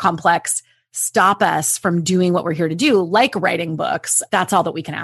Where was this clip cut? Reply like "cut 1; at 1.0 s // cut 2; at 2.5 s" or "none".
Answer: cut 1; at 4.1 s